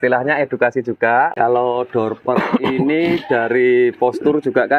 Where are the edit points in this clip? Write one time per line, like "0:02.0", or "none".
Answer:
0:01.3